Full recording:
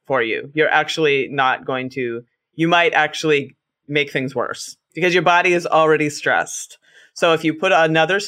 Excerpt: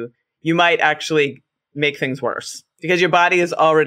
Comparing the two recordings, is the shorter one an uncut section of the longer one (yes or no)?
yes